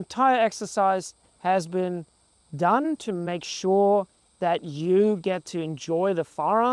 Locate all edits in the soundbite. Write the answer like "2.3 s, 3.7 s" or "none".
3.0 s